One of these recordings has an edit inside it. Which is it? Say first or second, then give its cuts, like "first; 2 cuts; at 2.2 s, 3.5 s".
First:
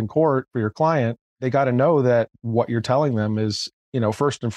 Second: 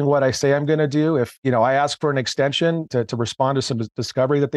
second; 1 cut; at 1.3 s